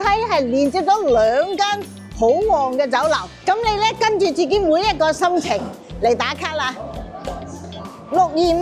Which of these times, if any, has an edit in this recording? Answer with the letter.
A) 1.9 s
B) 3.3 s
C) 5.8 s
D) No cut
B